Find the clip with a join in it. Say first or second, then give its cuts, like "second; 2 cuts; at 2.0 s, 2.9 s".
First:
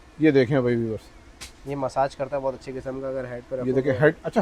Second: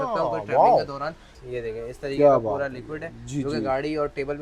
second; 1 cut; at 1.4 s